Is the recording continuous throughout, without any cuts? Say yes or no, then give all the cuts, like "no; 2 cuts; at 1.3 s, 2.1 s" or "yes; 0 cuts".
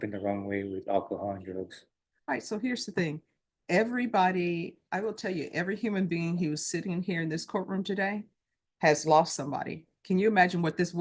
yes; 0 cuts